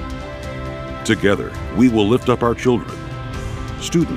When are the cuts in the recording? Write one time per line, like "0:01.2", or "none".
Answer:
0:01.0